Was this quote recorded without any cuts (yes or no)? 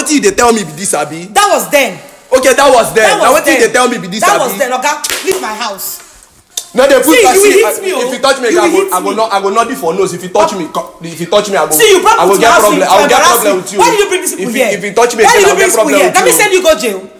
yes